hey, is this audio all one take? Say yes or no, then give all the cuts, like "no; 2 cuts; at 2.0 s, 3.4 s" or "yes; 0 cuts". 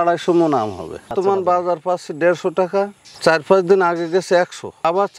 no; 1 cut; at 1.1 s